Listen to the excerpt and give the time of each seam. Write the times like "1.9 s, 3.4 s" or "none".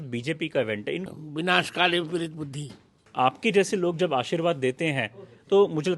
1.0 s, 3.0 s